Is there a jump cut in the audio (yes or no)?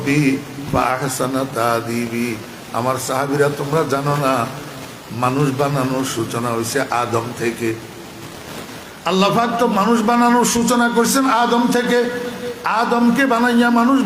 no